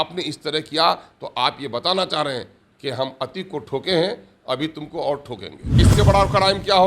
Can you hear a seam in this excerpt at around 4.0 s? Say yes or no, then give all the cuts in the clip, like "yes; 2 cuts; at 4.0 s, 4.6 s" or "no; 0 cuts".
no; 1 cut; at 5.8 s